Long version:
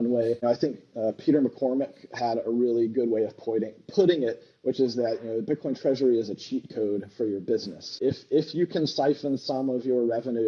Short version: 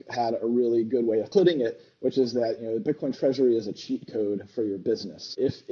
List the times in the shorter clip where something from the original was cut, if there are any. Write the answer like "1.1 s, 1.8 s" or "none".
1.3 s